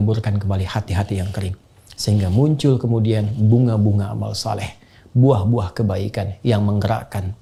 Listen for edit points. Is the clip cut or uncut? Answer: uncut